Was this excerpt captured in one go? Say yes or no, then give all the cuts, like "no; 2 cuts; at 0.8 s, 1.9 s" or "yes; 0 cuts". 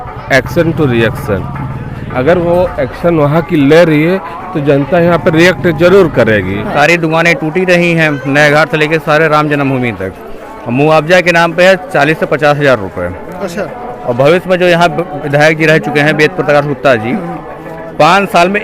no; 1 cut; at 6.6 s